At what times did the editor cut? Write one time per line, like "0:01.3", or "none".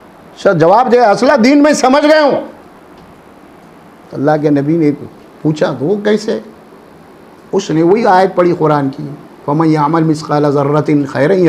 none